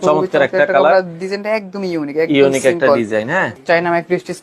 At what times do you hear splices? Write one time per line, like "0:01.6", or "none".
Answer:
0:03.5